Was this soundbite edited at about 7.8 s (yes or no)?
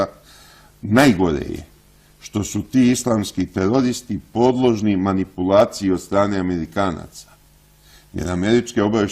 yes